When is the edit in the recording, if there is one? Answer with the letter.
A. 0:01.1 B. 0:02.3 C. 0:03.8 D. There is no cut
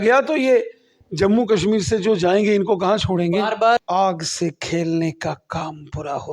C